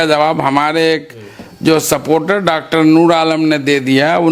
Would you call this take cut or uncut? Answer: uncut